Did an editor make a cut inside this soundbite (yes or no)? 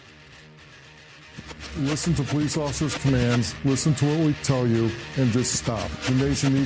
yes